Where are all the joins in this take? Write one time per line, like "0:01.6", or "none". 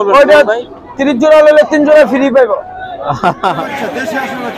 0:03.6